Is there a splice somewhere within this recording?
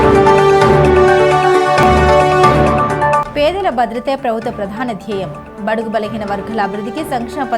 yes; 1 cut; at 1.1 s

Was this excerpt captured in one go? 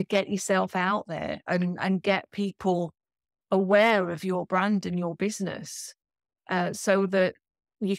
yes; 0 cuts

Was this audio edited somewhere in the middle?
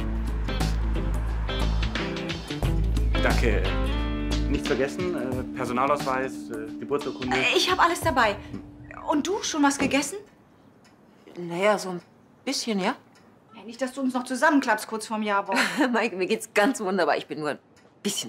no; 0 cuts

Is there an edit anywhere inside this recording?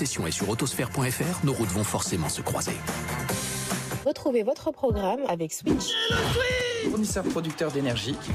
no; 0 cuts

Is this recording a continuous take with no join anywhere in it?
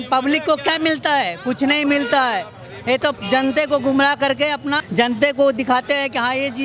no; 1 cut; at 4.8 s

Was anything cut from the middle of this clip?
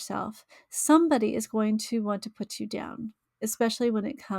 no; 0 cuts

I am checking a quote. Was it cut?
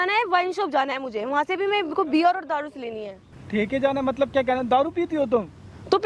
no; 0 cuts

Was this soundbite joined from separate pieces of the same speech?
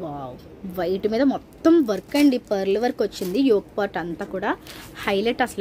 no; 0 cuts

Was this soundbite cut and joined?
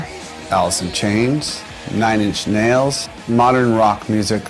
no; 0 cuts

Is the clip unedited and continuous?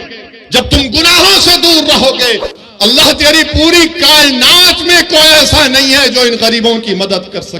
no; 1 cut; at 2.5 s

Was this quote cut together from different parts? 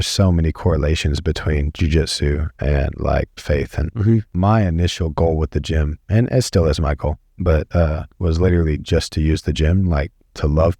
yes; 1 cut; at 4.3 s

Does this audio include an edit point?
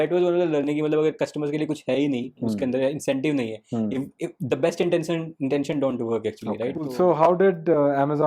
yes; 1 cut; at 6.8 s

